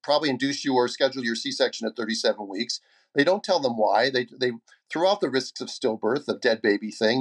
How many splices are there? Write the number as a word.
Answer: zero